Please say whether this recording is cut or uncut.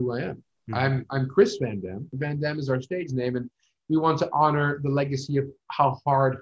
cut